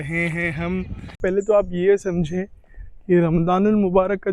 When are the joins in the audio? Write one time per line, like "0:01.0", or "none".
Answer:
0:01.2